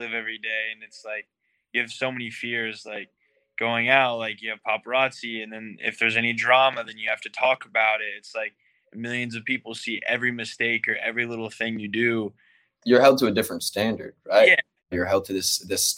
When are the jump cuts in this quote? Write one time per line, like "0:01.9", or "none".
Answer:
0:12.8
0:14.9